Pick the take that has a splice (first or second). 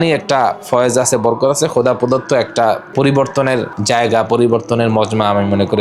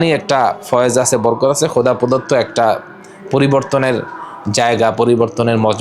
first